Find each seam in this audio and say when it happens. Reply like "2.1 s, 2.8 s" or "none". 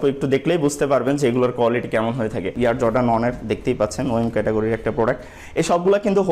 2.4 s